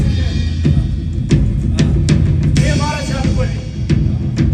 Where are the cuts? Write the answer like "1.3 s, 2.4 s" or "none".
none